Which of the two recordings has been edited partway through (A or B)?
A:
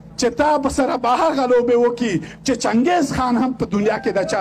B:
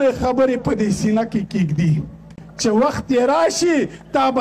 B